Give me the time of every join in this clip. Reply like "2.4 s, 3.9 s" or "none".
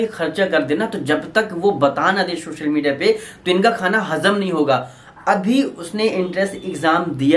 none